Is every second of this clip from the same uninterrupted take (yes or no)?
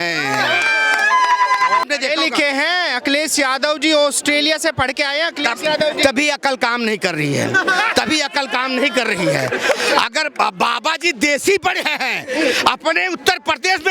no